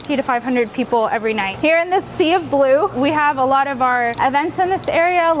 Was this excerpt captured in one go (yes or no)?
no